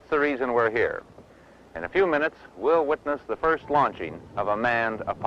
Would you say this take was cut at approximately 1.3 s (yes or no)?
no